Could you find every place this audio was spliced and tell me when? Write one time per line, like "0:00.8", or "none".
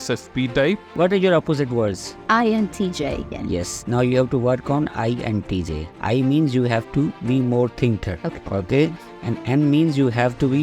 0:00.9
0:02.1
0:03.3
0:08.1